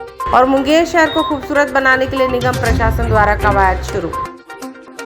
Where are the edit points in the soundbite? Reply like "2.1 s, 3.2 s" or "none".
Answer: none